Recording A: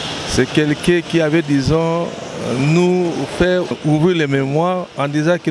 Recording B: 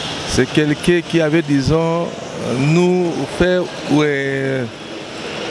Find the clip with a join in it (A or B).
A